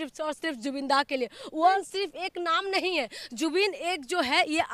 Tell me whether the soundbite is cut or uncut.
cut